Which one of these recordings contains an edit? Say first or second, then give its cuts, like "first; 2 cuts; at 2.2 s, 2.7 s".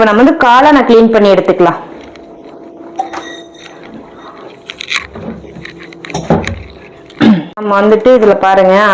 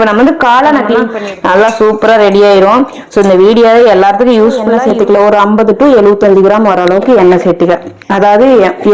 second; 2 cuts; at 1.1 s, 4.7 s